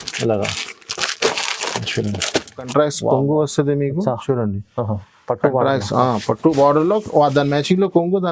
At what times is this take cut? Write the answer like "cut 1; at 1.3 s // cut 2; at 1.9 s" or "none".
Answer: cut 1; at 2.7 s